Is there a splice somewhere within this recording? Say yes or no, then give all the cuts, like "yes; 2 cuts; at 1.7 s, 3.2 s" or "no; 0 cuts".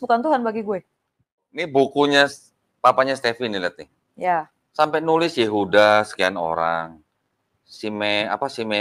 yes; 1 cut; at 1.5 s